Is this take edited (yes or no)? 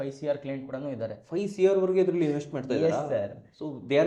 no